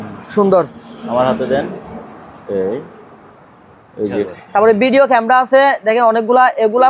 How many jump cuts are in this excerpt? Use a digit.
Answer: 1